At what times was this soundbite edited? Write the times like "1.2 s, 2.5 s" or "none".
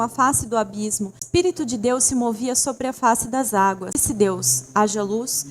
1.2 s, 4.0 s